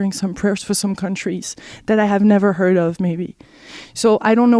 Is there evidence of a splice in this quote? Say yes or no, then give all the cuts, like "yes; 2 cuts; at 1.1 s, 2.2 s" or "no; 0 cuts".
yes; 1 cut; at 2.8 s